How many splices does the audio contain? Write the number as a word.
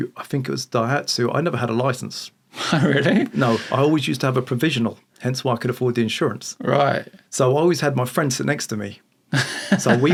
zero